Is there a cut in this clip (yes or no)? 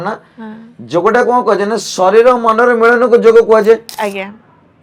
no